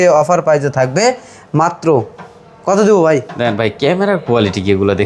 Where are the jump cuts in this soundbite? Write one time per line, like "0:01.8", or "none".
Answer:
none